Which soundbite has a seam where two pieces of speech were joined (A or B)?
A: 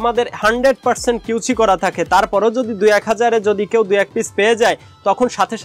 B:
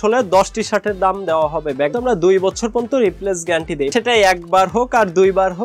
B